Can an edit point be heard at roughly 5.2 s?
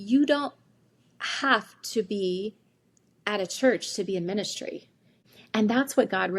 yes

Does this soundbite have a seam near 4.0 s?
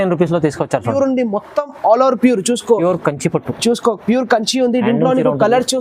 no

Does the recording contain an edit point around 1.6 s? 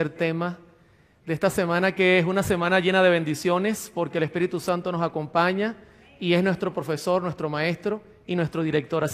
no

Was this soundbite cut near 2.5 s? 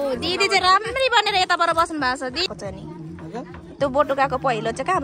yes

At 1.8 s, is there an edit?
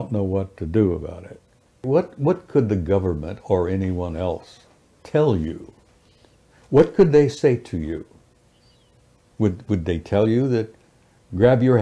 yes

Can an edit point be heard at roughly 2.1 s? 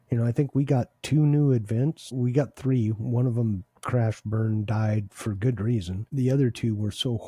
yes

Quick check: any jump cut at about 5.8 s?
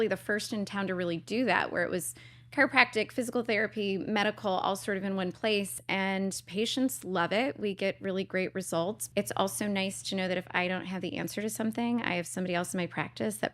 yes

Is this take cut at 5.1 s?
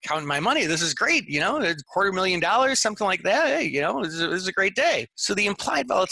yes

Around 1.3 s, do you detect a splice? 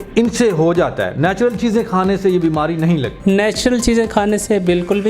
no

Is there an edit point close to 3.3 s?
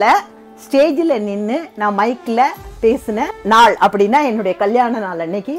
yes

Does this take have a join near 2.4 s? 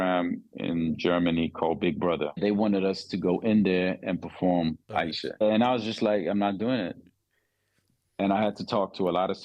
yes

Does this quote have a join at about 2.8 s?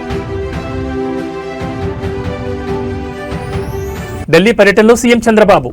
no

